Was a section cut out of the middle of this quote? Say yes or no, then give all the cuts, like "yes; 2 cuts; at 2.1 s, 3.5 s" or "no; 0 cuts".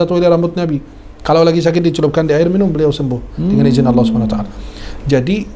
no; 0 cuts